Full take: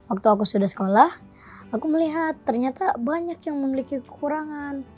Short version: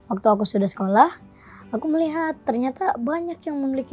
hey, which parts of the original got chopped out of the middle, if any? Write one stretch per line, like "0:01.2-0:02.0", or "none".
none

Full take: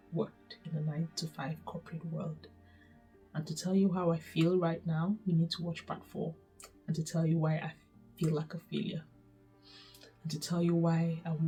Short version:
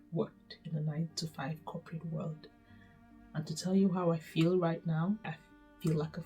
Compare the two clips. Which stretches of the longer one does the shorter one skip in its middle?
0:05.2-0:07.6

